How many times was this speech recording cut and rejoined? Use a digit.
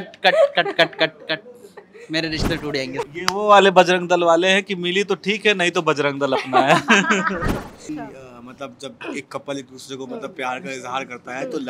2